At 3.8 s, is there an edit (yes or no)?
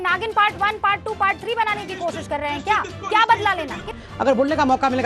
yes